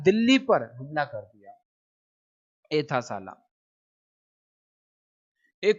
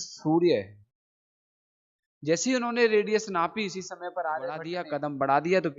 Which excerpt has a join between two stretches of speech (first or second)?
second